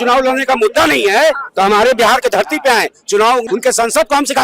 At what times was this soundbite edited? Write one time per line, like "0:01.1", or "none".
0:03.5

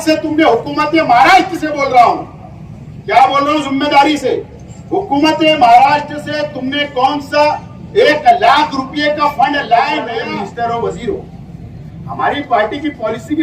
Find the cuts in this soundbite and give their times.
0:10.1

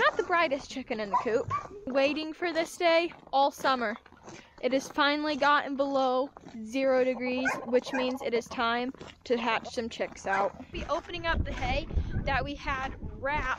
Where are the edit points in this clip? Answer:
0:01.9
0:10.7

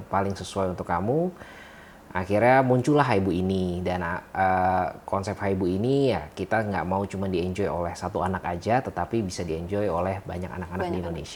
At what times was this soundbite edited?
none

